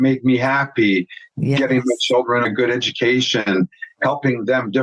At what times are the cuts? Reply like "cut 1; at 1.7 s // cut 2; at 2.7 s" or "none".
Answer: cut 1; at 2.4 s